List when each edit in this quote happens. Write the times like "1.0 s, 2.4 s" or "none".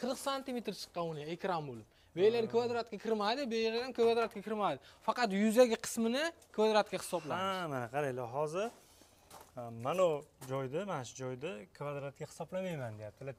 none